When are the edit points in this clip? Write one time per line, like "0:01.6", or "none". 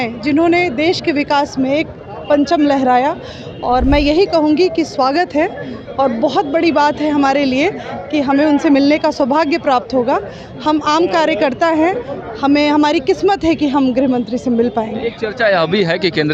none